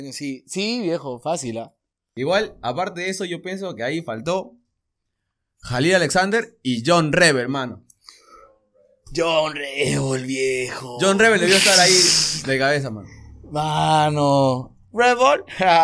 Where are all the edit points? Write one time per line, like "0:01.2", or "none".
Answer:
0:02.1